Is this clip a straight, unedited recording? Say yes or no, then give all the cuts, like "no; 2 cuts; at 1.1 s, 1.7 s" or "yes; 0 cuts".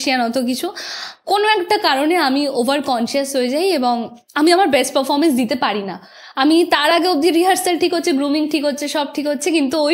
yes; 0 cuts